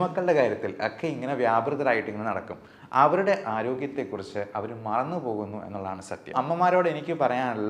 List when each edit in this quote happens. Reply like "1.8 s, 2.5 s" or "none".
6.3 s